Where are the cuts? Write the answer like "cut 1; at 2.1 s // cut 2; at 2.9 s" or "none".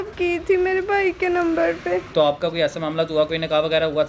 cut 1; at 2.1 s